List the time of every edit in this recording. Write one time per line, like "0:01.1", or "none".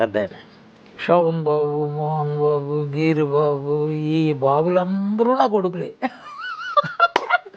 0:06.0

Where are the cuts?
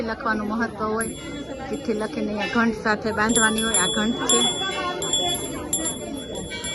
none

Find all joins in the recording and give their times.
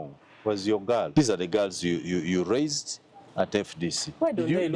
0:01.1

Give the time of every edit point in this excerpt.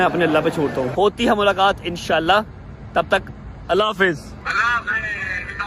0:00.9
0:04.4

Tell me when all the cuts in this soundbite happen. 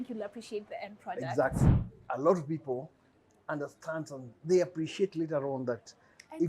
0:01.9

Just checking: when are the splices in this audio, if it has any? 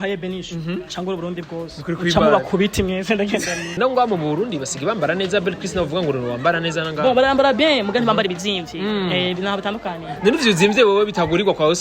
0:03.8

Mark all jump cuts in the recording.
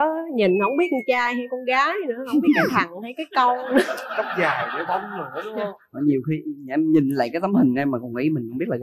none

